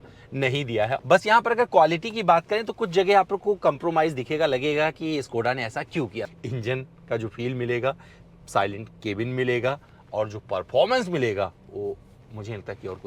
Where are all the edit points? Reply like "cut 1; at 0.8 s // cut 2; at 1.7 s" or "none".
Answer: cut 1; at 1.0 s // cut 2; at 6.3 s